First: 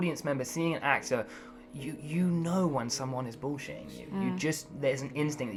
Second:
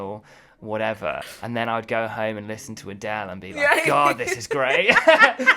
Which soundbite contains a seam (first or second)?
second